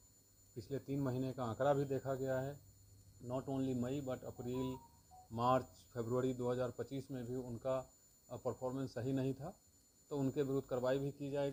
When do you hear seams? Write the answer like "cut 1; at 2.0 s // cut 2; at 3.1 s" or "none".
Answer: none